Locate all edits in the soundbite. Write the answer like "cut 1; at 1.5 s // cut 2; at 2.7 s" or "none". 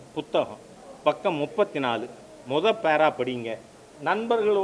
none